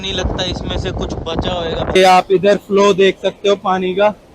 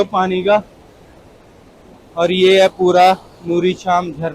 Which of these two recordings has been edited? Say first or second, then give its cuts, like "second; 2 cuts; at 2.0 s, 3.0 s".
first; 1 cut; at 2.0 s